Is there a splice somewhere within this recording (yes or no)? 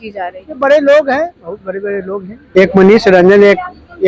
yes